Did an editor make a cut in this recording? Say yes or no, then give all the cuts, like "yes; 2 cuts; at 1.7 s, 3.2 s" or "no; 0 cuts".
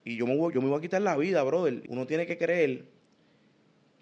yes; 1 cut; at 1.8 s